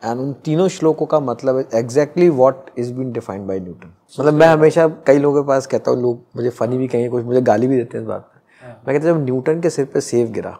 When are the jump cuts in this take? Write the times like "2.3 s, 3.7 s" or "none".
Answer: 4.1 s